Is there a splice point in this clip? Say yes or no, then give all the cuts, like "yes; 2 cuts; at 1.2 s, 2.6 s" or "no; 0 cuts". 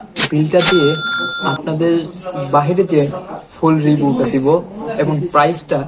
no; 0 cuts